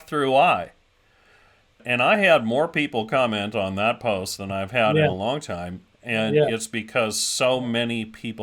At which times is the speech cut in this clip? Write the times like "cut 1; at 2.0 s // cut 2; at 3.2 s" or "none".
cut 1; at 1.8 s